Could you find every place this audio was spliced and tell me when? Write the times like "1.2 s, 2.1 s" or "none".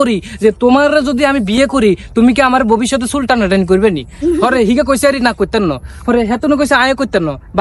none